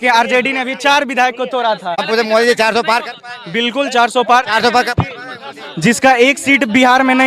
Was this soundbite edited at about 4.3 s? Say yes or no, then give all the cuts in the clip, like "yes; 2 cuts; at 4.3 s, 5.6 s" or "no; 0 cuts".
no; 0 cuts